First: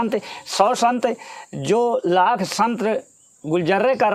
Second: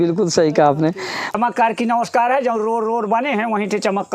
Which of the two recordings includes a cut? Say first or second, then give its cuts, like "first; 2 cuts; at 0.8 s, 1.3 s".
second; 1 cut; at 1.3 s